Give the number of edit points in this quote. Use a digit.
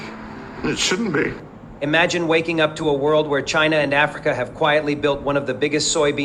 0